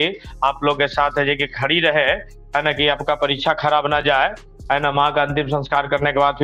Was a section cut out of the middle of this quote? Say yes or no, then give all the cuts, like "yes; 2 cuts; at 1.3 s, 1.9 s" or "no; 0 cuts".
no; 0 cuts